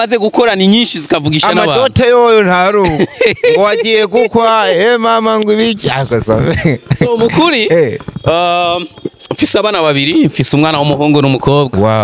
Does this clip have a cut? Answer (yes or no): no